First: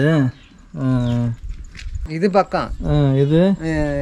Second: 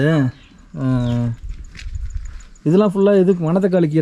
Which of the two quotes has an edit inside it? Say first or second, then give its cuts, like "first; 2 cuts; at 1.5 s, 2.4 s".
first; 1 cut; at 2.1 s